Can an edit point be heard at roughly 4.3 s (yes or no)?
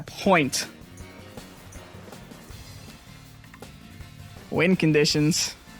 yes